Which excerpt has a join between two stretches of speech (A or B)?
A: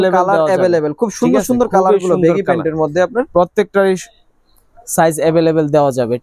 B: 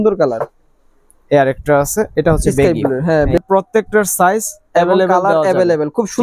B